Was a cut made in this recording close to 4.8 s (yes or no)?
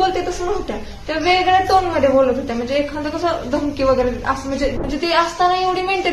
yes